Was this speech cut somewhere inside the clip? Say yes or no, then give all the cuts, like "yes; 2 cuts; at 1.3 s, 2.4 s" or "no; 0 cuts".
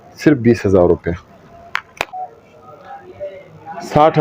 yes; 1 cut; at 2.1 s